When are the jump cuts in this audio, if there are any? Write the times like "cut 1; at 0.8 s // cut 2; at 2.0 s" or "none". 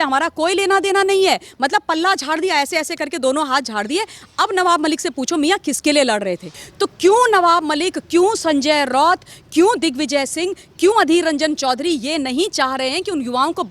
cut 1; at 6.6 s